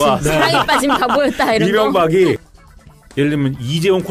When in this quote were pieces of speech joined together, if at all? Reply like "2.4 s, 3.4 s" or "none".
2.5 s